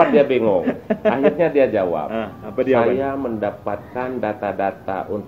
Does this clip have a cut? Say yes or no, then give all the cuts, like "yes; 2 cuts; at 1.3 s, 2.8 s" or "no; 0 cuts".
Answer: no; 0 cuts